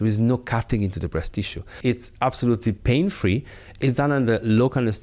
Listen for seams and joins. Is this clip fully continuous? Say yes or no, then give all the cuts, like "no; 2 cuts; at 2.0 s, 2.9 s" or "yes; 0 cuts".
no; 1 cut; at 1.7 s